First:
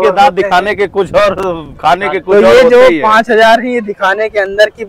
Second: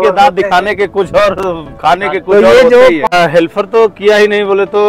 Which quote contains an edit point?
second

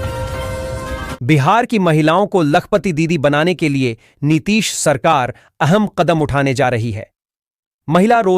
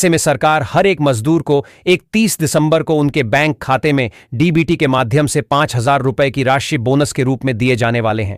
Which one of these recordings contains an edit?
first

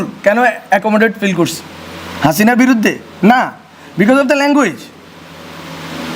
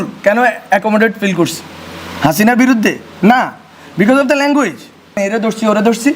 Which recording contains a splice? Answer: second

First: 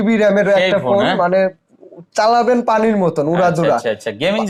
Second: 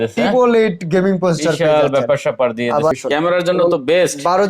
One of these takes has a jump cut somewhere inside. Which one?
second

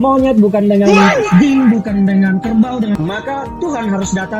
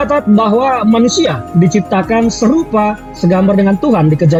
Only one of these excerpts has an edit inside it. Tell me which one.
first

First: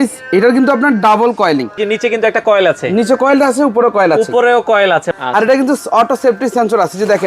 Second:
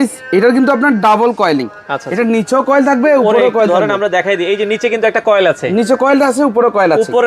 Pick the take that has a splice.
first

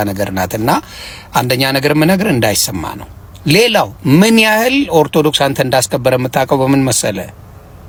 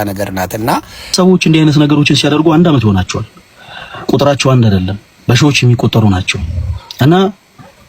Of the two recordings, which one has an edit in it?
second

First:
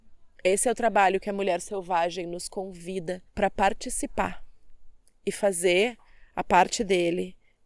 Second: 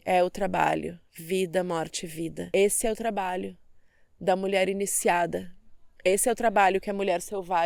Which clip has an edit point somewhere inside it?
first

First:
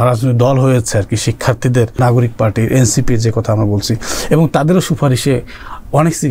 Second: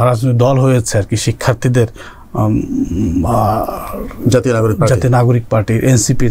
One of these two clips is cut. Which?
first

